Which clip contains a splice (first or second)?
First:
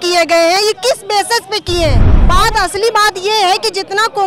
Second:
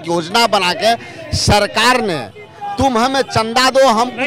first